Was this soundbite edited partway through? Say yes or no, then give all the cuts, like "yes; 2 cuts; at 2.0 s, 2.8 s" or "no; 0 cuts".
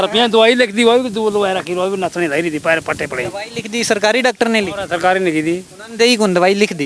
no; 0 cuts